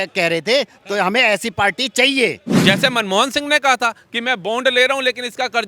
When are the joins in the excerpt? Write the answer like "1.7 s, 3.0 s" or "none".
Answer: 2.5 s